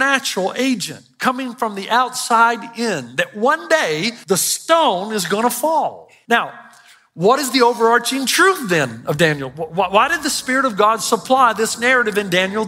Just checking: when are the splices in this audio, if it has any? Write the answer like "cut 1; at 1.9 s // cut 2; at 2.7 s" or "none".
cut 1; at 4.1 s // cut 2; at 6.1 s